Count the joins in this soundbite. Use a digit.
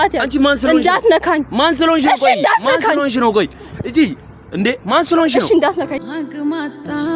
1